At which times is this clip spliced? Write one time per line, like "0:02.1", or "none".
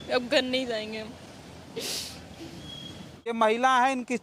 0:03.3